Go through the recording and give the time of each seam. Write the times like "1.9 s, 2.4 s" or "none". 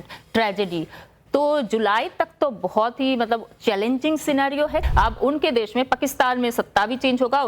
4.8 s